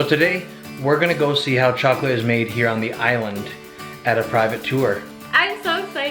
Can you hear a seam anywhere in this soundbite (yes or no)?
yes